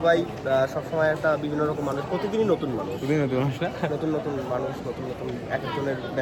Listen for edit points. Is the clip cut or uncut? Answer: uncut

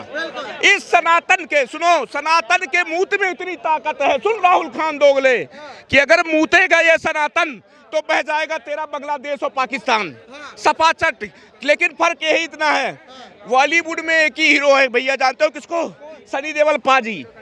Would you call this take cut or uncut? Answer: uncut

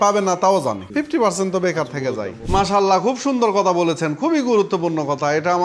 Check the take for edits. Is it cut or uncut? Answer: cut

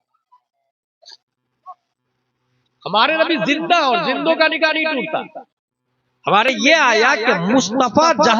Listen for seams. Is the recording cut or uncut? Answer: cut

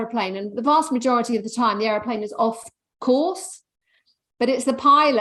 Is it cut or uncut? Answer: uncut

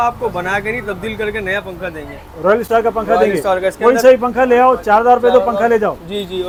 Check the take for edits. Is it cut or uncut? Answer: uncut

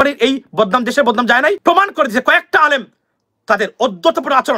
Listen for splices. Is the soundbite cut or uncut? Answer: cut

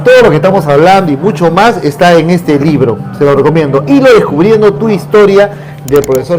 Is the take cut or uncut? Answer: uncut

